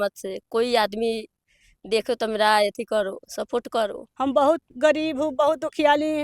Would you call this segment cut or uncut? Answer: cut